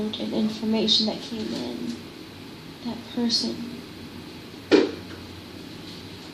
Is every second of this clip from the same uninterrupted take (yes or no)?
yes